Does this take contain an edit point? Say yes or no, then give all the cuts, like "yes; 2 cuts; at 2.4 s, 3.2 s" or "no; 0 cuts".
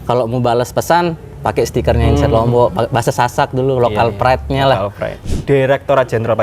yes; 1 cut; at 5.1 s